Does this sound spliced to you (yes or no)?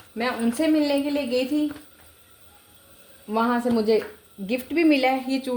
no